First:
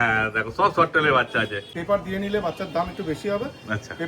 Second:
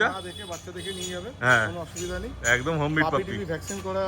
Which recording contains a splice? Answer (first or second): first